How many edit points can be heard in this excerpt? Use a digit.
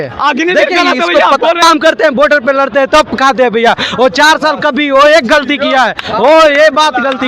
1